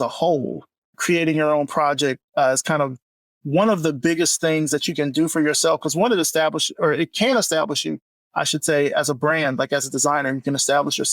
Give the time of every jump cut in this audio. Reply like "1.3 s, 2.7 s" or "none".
1.0 s